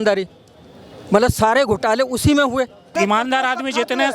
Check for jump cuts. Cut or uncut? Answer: cut